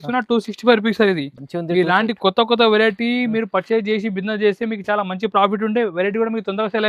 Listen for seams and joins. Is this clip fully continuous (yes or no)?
yes